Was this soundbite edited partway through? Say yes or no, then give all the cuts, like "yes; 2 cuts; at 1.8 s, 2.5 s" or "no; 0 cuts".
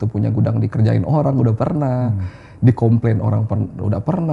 no; 0 cuts